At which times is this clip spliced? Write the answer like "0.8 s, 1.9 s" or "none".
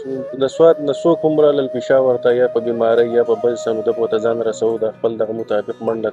none